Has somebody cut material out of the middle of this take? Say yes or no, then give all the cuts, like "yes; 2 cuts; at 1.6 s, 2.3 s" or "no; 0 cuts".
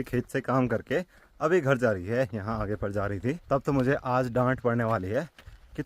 yes; 1 cut; at 3.4 s